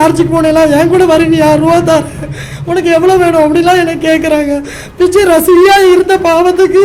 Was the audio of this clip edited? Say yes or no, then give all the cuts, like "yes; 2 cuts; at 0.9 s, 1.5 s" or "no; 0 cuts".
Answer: no; 0 cuts